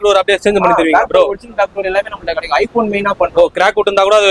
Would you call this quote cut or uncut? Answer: uncut